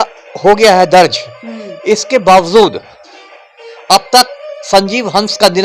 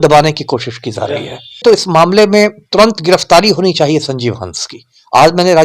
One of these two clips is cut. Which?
second; 1 cut; at 1.6 s

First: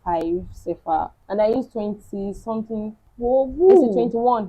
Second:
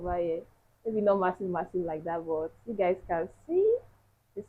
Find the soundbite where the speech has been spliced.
first; 2 cuts; at 1.2 s, 3.0 s

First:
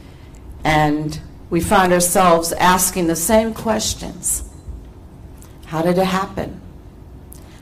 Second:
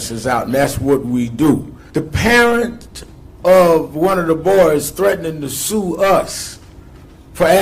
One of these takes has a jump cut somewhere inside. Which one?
second; 1 cut; at 1.8 s

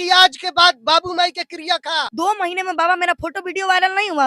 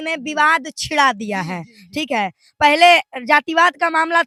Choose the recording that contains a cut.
first; 1 cut; at 2.1 s

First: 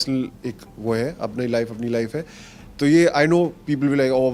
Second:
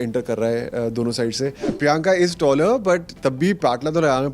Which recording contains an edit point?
second; 1 cut; at 1.8 s

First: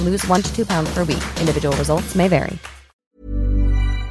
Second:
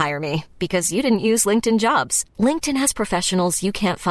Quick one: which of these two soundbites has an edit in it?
first; 1 cut; at 3.1 s

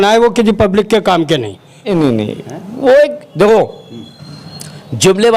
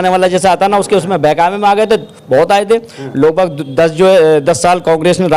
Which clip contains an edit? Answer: first; 1 cut; at 1.7 s

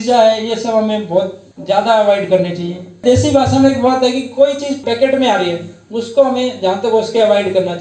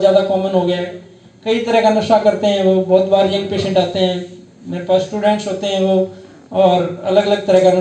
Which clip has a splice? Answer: first; 2 cuts; at 3.0 s, 4.8 s

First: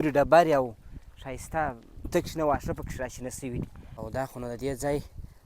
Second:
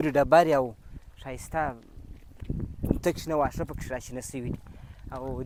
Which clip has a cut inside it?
first; 2 cuts; at 2.1 s, 3.9 s

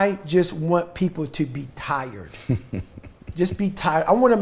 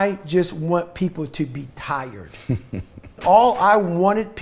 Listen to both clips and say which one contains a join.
second; 1 cut; at 3.1 s

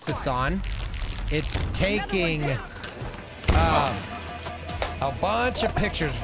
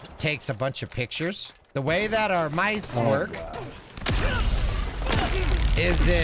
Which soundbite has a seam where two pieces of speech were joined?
second; 1 cut; at 1.6 s

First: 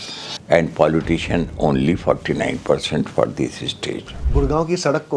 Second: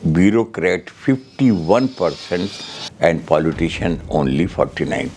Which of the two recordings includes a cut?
first; 1 cut; at 4.1 s

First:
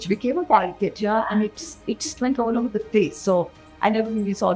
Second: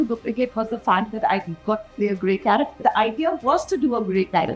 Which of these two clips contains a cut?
second; 1 cut; at 2.8 s

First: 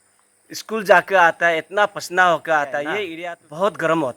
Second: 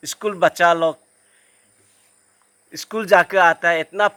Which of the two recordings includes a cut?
first; 1 cut; at 3.1 s

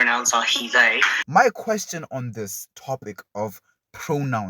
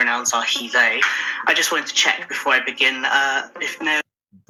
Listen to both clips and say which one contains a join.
first; 1 cut; at 1.1 s

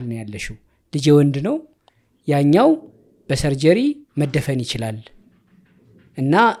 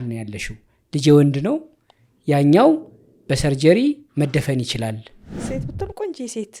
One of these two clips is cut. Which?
second; 1 cut; at 5.4 s

